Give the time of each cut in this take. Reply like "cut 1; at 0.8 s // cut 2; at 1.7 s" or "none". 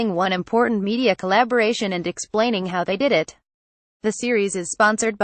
none